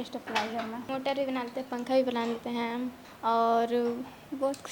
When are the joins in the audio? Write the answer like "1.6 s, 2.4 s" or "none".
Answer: 0.9 s, 3.0 s